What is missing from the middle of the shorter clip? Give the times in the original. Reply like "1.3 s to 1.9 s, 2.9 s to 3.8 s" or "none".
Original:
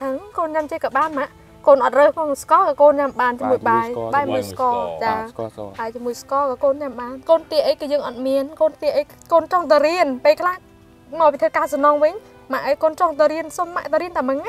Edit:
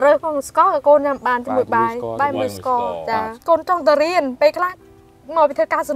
5.3 s to 9.2 s

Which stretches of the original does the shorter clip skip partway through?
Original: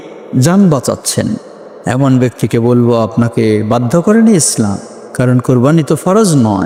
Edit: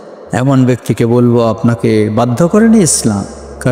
none

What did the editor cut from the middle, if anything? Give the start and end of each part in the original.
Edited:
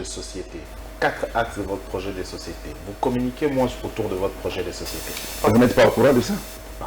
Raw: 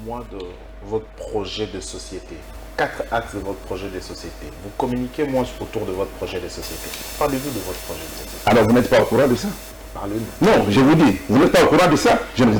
7.2 s to 8.6 s

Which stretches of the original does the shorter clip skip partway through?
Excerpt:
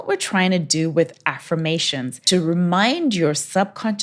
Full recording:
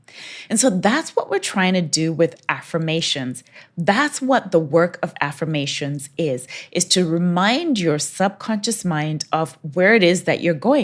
3.5 s to 6.9 s

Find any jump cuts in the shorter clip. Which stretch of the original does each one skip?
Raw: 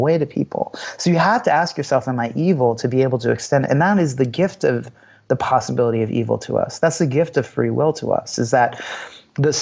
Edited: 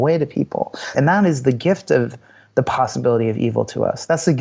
0.9 s to 3.7 s

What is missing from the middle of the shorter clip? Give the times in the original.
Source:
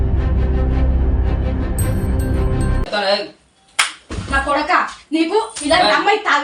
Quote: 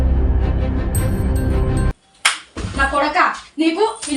2.8 s to 3.5 s

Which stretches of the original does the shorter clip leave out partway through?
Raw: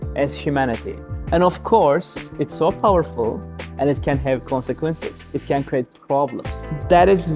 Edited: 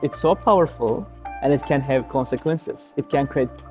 none

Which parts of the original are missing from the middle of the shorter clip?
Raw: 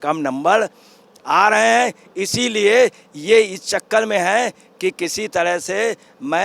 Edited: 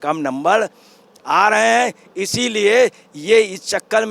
none

